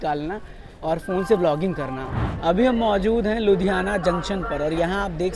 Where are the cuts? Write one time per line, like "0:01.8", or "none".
0:02.3